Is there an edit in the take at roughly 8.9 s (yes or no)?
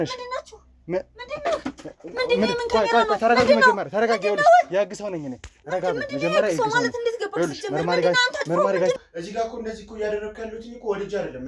yes